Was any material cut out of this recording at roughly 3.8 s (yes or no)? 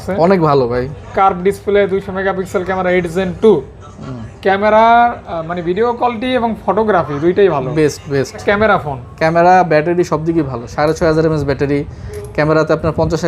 no